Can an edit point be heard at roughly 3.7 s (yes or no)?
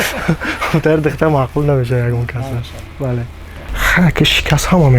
yes